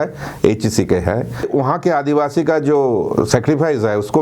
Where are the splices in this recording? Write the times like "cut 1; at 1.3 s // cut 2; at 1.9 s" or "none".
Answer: cut 1; at 1.5 s